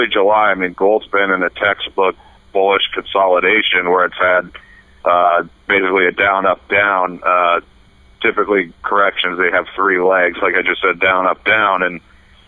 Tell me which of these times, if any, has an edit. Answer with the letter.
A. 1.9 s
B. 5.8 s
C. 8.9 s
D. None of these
A